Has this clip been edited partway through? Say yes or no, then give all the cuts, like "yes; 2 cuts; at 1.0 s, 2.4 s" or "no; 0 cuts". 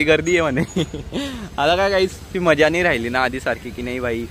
no; 0 cuts